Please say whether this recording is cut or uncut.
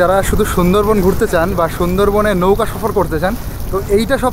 uncut